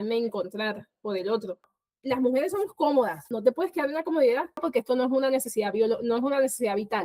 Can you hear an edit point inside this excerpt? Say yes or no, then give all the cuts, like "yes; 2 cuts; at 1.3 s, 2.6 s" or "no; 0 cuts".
yes; 3 cuts; at 1.7 s, 3.2 s, 4.6 s